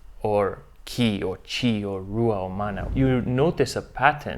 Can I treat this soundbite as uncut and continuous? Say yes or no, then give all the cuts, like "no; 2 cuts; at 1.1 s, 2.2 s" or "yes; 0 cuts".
no; 1 cut; at 2.9 s